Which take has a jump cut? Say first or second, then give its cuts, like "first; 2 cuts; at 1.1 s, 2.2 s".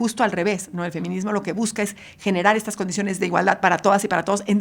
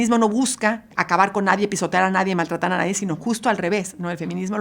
second; 1 cut; at 0.9 s